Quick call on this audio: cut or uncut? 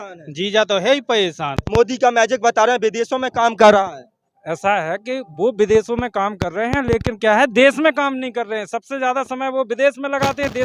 cut